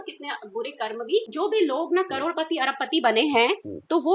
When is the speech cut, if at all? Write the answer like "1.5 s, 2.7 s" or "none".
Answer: 1.3 s